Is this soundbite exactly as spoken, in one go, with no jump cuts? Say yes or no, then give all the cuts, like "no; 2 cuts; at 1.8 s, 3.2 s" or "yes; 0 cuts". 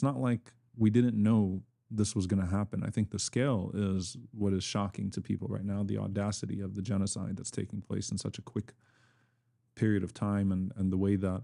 yes; 0 cuts